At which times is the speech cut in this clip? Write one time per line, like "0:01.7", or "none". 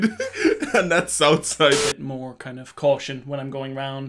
0:01.8